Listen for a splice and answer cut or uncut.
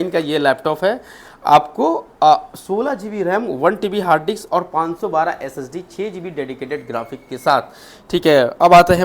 uncut